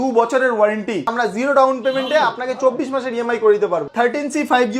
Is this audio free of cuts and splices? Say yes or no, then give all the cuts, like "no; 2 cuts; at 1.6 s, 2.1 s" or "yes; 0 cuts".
no; 2 cuts; at 1.1 s, 3.8 s